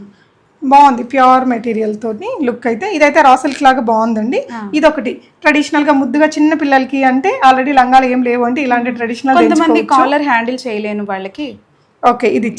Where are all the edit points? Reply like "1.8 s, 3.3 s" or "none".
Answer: none